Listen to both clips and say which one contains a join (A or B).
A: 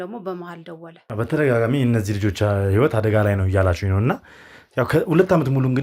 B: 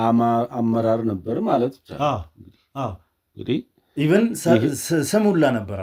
A